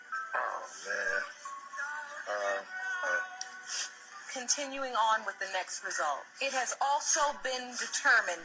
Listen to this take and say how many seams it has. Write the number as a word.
zero